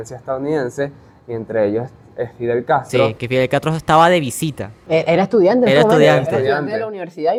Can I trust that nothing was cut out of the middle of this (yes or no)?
yes